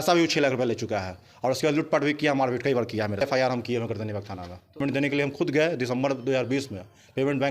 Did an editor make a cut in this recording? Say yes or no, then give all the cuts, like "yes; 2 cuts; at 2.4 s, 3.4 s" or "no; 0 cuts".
yes; 2 cuts; at 3.2 s, 4.8 s